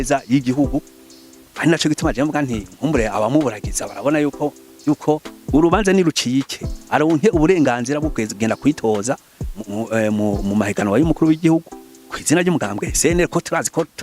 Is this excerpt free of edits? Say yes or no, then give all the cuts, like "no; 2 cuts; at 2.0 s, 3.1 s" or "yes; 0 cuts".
no; 1 cut; at 5.3 s